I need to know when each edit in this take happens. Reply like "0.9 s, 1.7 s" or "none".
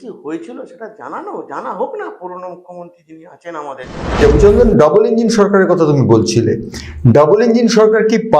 4.2 s